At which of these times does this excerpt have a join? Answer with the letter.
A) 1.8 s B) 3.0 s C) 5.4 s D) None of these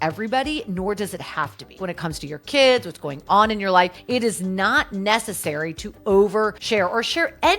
A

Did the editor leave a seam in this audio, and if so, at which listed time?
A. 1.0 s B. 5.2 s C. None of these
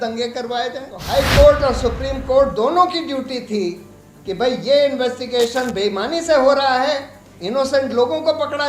A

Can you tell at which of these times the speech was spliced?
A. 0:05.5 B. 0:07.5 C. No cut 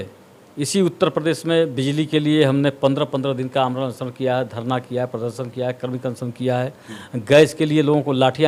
C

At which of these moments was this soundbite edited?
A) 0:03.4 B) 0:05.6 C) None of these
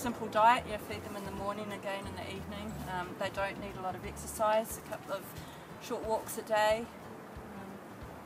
C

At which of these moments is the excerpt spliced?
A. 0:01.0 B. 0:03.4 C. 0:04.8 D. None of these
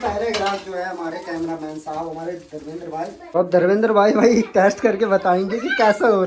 B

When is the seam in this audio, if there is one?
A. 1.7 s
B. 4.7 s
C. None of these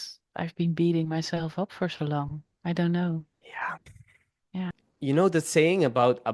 B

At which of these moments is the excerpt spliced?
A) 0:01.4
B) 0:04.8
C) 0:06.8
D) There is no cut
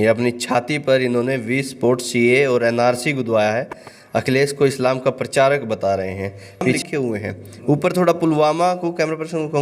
C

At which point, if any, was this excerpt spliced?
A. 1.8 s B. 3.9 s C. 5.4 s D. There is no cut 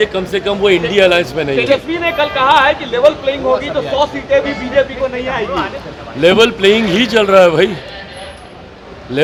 D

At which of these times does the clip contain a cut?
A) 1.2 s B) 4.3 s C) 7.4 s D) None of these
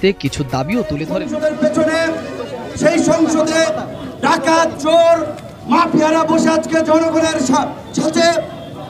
A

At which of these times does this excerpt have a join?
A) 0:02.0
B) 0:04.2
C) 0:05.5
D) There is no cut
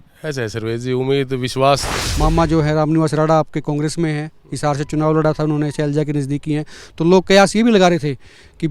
A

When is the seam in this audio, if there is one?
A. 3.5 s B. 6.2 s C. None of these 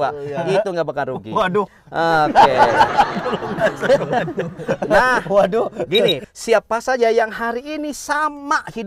B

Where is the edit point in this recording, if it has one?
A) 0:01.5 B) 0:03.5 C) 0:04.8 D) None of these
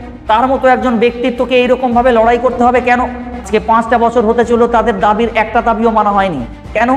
B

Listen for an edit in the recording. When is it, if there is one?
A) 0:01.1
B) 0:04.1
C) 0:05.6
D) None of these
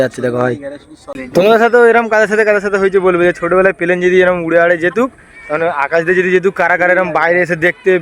A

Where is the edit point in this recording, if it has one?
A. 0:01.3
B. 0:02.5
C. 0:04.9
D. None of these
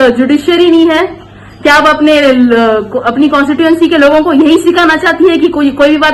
D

